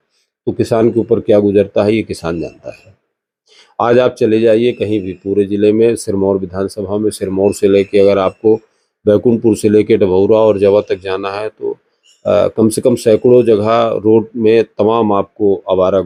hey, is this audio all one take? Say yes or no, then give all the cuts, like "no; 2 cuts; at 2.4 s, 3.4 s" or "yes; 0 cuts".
yes; 0 cuts